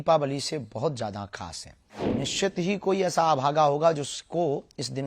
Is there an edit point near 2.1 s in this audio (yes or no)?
yes